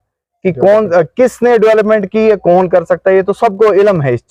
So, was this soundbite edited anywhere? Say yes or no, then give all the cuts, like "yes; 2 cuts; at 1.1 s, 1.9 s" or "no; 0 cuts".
no; 0 cuts